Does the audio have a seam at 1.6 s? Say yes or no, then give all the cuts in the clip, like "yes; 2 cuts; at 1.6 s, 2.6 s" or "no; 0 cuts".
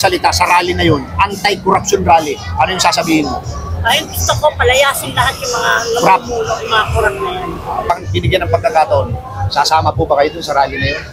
no; 1 cut; at 7.9 s